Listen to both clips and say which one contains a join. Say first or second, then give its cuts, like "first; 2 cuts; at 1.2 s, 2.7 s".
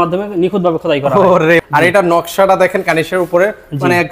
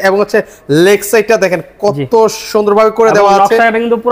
first; 1 cut; at 1.6 s